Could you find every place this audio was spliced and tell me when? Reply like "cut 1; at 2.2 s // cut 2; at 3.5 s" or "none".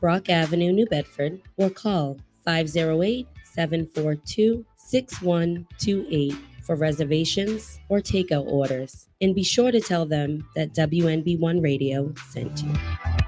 none